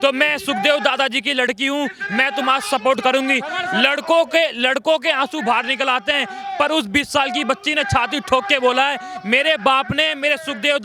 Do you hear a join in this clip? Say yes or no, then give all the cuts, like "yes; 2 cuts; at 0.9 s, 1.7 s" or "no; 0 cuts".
no; 0 cuts